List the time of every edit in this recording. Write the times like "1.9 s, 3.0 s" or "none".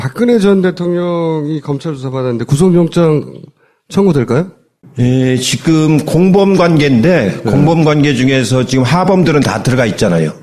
none